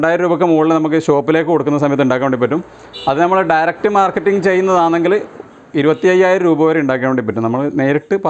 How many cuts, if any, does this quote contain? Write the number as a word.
zero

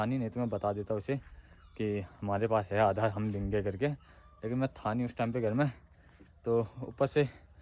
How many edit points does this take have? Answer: zero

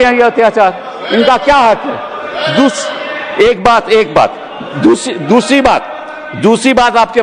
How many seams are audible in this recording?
zero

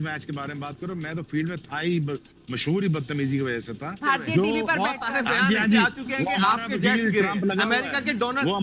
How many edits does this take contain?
one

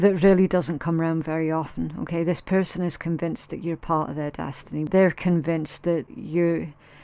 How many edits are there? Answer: two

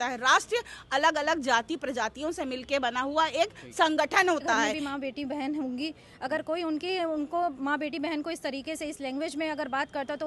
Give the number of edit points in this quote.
one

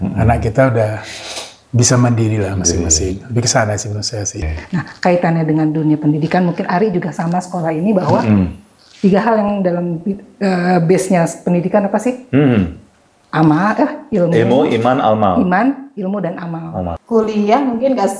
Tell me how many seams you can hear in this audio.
two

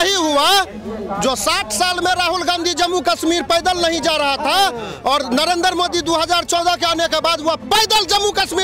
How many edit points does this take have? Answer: zero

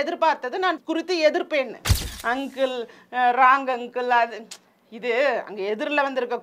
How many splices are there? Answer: two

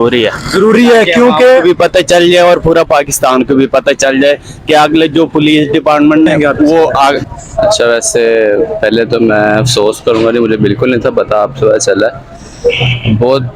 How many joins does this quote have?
one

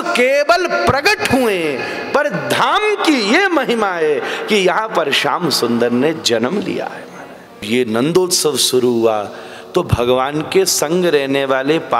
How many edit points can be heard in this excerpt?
one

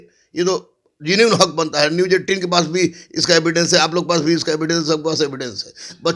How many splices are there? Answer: zero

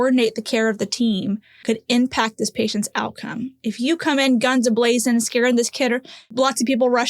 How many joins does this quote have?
two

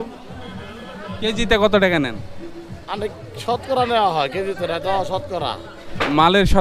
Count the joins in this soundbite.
zero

